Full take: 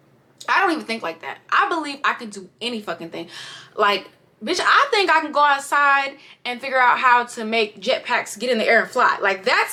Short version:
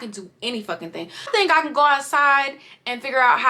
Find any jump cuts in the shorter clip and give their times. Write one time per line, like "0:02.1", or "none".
0:01.3